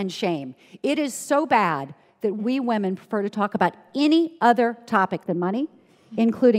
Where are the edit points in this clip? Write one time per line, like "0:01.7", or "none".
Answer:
0:02.4
0:05.2